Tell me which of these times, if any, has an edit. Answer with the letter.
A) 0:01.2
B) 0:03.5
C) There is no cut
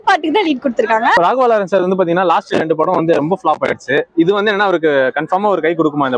A